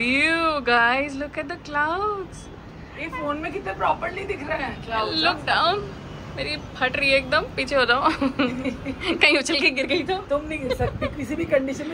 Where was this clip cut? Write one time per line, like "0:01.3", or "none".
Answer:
none